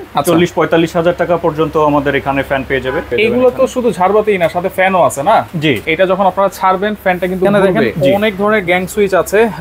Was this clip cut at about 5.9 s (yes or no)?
yes